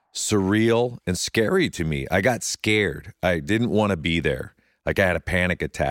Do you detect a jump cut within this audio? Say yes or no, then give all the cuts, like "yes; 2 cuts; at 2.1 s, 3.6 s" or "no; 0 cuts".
no; 0 cuts